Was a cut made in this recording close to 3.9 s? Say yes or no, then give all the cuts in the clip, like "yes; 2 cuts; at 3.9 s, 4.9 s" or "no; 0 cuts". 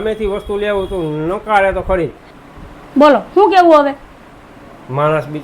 no; 1 cut; at 2.3 s